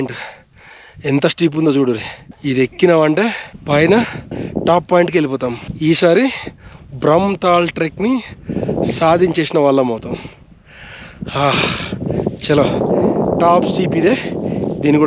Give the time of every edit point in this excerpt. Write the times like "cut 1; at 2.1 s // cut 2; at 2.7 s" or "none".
none